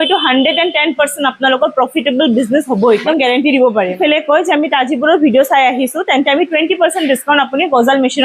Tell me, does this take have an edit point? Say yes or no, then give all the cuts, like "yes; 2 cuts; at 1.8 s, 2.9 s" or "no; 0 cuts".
yes; 2 cuts; at 3.0 s, 4.0 s